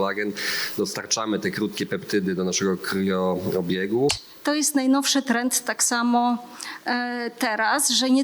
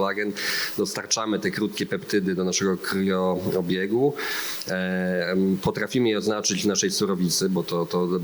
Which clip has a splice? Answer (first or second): first